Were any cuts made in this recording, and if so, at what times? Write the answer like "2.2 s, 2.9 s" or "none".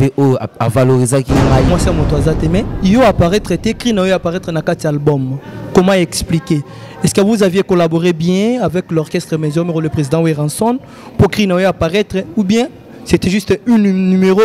1.7 s